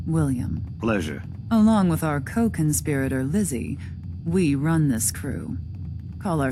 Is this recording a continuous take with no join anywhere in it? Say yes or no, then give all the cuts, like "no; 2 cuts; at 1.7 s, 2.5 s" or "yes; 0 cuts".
yes; 0 cuts